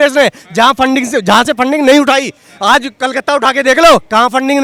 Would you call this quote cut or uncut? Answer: uncut